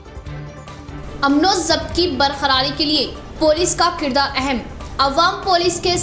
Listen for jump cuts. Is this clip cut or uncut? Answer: cut